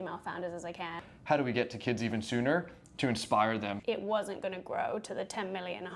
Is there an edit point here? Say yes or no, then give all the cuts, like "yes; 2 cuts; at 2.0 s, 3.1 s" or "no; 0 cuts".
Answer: yes; 2 cuts; at 1.1 s, 3.8 s